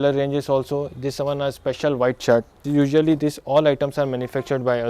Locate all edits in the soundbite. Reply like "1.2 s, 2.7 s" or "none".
2.6 s